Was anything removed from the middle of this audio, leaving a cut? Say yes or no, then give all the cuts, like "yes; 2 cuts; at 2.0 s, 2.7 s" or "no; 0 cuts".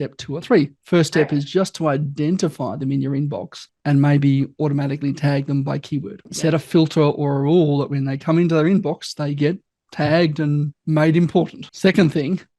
yes; 2 cuts; at 6.3 s, 11.6 s